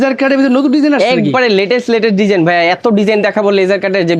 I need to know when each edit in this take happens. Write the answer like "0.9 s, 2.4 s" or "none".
none